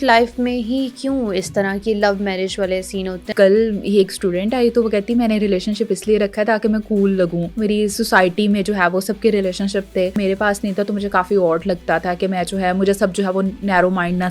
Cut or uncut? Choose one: cut